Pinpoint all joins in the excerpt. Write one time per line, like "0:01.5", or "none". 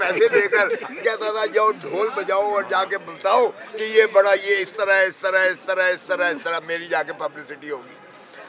none